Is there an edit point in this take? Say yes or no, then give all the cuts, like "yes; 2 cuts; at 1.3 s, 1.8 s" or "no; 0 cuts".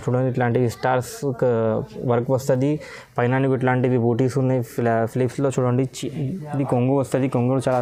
no; 0 cuts